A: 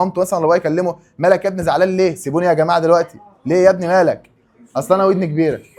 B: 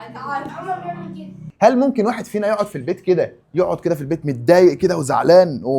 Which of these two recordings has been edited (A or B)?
B